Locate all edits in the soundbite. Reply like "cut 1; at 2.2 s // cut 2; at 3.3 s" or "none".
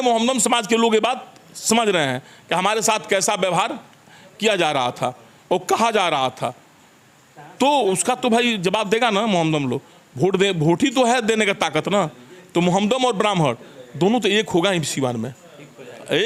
none